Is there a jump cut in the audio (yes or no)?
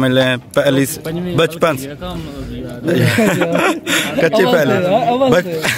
no